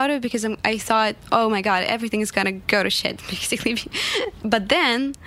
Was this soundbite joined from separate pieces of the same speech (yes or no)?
yes